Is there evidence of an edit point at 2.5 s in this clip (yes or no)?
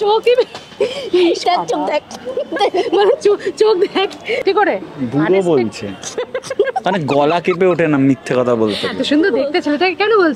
no